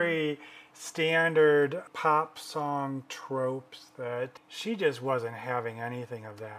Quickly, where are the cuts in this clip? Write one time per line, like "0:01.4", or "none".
0:01.9
0:04.5

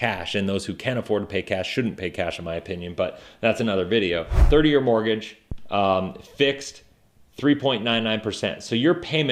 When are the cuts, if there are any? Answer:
0:04.3

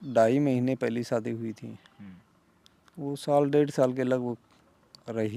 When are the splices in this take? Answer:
none

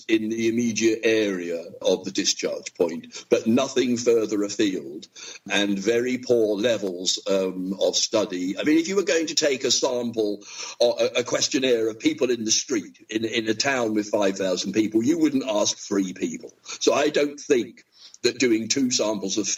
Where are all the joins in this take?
none

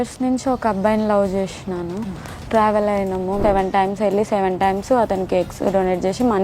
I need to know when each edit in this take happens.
0:03.4

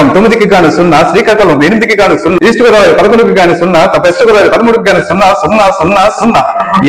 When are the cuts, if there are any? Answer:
0:02.4

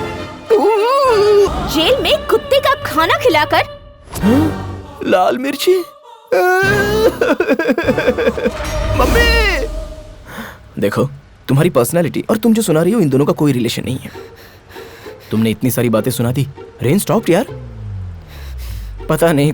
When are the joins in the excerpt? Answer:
none

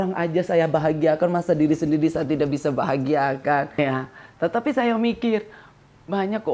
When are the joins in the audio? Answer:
0:03.7

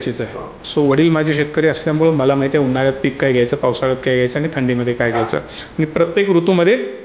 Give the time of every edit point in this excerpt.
none

